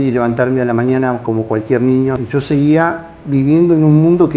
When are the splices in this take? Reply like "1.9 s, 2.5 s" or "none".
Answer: 2.2 s